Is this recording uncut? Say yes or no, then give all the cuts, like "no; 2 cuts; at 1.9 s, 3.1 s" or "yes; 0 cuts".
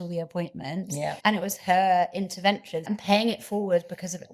no; 2 cuts; at 1.2 s, 2.9 s